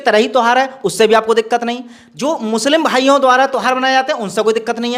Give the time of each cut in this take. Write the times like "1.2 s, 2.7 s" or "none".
none